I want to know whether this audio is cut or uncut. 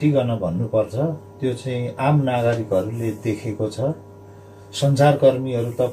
uncut